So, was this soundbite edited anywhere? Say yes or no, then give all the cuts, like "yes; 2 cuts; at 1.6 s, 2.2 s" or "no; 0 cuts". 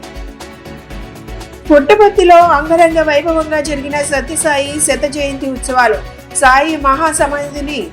yes; 1 cut; at 1.4 s